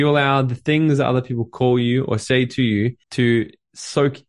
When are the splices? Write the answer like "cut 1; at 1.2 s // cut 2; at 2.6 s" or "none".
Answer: cut 1; at 3.0 s